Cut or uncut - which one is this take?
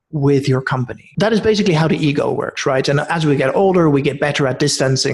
cut